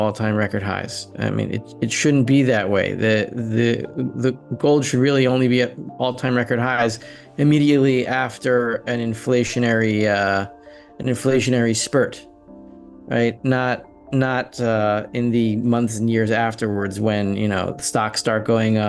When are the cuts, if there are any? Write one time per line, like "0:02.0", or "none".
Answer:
none